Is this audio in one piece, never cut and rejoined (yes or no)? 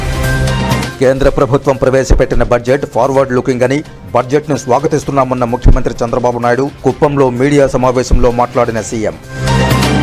no